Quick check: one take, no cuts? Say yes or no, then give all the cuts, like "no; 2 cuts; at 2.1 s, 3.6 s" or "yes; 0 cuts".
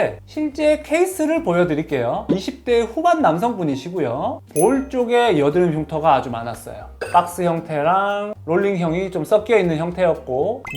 no; 1 cut; at 2.2 s